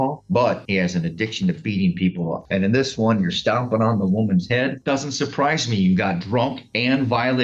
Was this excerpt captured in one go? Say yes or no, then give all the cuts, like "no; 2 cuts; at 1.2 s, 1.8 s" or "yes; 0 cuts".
no; 2 cuts; at 2.4 s, 4.8 s